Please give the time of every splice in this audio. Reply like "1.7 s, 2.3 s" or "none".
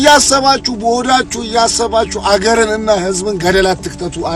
none